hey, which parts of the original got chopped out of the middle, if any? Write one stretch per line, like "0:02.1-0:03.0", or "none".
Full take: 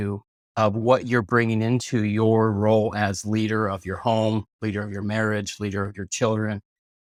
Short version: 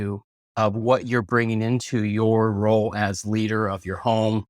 none